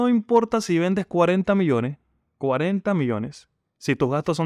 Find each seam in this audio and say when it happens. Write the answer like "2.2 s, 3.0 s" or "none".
none